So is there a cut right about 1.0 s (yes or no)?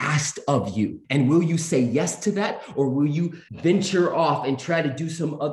yes